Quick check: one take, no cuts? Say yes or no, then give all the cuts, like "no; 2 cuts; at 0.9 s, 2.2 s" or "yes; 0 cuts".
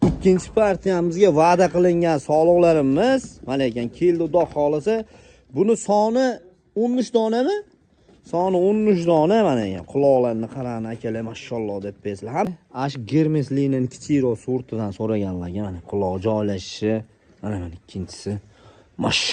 no; 1 cut; at 12.4 s